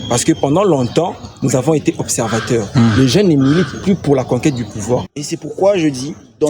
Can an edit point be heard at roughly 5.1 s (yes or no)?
yes